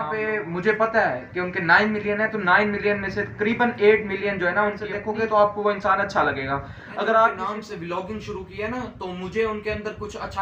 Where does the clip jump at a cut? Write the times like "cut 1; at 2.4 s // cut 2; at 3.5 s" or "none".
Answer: cut 1; at 5.0 s // cut 2; at 7.4 s